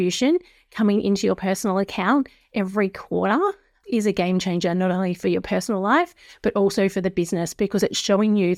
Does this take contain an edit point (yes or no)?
no